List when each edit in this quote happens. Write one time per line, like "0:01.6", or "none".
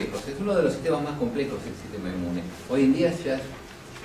none